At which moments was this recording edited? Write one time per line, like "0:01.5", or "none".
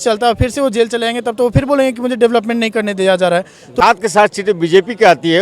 0:03.8

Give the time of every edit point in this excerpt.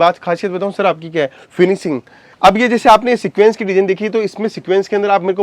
0:02.2

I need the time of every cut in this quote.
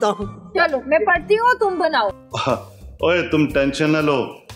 0:02.3

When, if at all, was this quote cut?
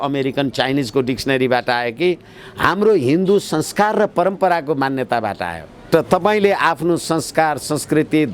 0:05.9

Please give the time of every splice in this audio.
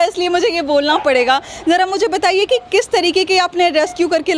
none

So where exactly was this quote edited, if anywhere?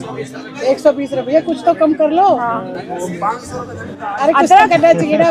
none

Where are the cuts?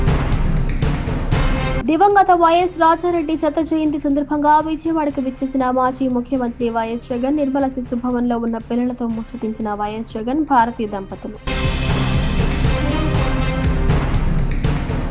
0:01.4

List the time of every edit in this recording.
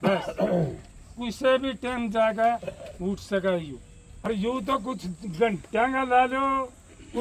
0:04.1

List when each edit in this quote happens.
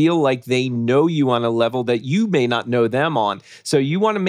none

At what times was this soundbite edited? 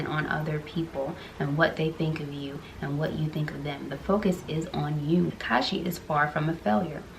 0:05.4

